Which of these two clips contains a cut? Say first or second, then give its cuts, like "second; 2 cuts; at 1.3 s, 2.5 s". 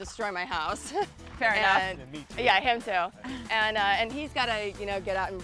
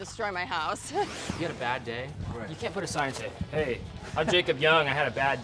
second; 1 cut; at 1.3 s